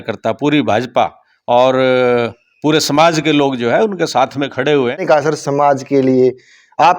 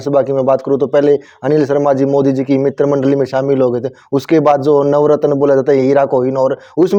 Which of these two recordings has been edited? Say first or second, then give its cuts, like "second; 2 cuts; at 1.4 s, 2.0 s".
first; 1 cut; at 5.0 s